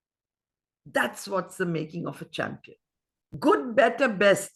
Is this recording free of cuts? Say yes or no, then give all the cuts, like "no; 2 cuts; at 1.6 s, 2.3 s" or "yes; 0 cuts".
yes; 0 cuts